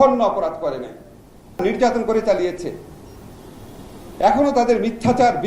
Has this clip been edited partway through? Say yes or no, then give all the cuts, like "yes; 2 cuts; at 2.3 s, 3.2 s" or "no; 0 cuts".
yes; 1 cut; at 1.6 s